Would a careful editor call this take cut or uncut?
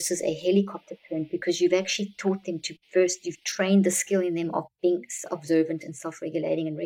uncut